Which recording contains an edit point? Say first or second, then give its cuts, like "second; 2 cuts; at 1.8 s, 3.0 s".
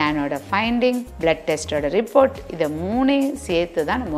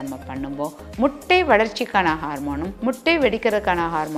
second; 1 cut; at 2.7 s